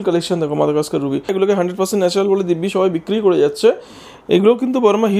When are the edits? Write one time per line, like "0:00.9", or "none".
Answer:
0:01.3